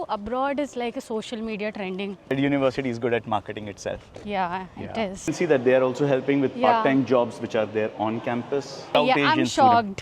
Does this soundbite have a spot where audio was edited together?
yes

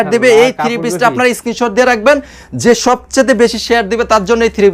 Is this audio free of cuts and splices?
yes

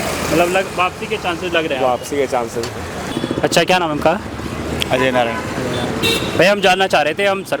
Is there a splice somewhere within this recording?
yes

